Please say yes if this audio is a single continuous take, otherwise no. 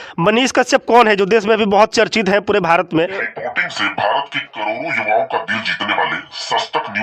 yes